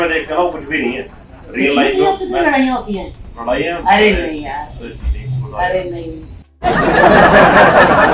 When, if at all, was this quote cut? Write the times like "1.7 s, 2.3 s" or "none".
none

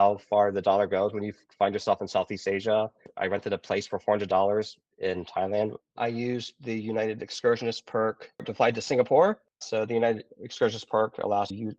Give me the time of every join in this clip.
3.1 s, 5.8 s

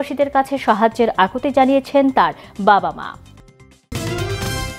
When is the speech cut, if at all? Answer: 3.9 s

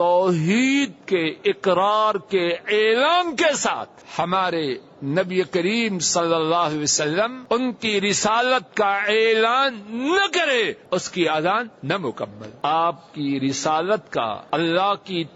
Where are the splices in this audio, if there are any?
4.0 s, 7.4 s, 10.8 s, 12.4 s, 14.4 s

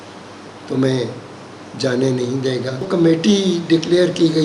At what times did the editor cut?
2.9 s

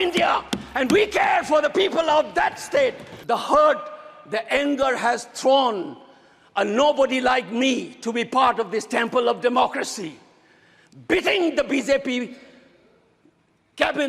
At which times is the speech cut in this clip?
3.1 s

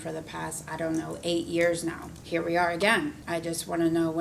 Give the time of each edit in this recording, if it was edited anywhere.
2.1 s, 3.2 s

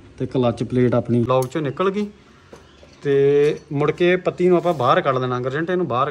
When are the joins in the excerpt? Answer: 1.2 s

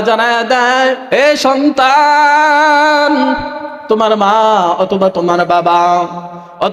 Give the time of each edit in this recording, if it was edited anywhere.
1.0 s

